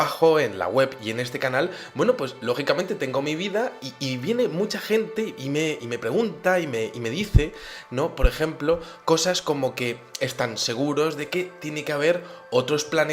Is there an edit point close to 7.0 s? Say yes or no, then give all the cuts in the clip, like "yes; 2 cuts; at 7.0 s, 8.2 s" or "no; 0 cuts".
yes; 1 cut; at 7.0 s